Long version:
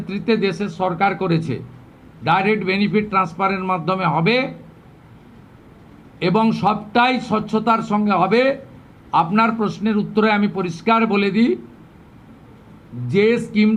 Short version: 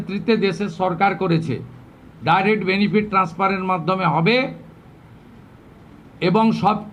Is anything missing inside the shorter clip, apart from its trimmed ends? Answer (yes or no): no